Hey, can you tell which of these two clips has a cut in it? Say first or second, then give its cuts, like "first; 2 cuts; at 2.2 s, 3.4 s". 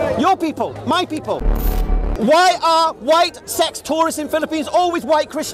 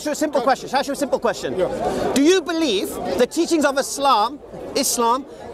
first; 1 cut; at 1.8 s